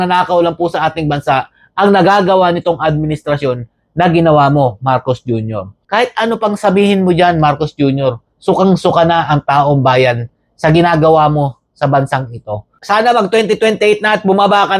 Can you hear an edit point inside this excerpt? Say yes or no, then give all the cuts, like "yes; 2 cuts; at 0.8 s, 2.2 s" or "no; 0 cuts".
yes; 2 cuts; at 5.7 s, 12.7 s